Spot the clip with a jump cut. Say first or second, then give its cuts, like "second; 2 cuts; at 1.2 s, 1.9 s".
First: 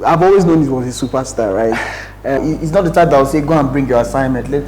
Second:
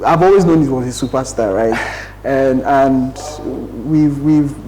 first; 1 cut; at 2.4 s